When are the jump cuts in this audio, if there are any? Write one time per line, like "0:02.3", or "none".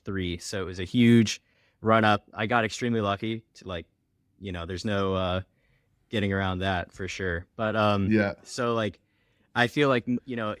none